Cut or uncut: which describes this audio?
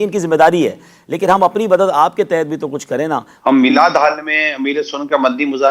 uncut